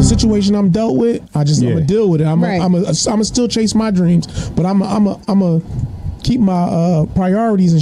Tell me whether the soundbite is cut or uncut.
uncut